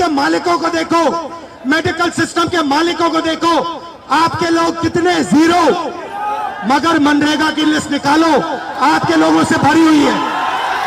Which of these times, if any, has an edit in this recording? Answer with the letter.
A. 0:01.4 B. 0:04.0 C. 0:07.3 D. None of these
D